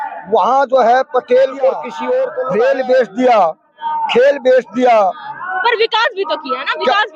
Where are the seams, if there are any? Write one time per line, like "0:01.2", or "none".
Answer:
0:02.4